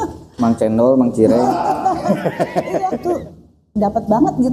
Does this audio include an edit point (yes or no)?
yes